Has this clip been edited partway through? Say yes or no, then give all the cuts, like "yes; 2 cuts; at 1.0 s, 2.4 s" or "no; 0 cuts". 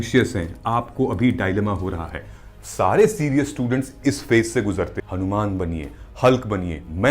yes; 1 cut; at 5.0 s